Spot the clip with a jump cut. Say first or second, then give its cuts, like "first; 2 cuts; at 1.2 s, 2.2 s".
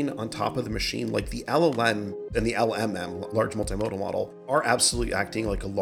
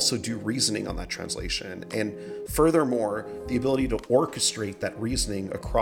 first; 3 cuts; at 2.3 s, 3.3 s, 4.5 s